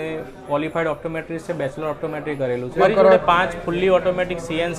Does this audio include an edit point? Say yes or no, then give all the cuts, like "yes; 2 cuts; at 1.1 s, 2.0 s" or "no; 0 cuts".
yes; 1 cut; at 2.8 s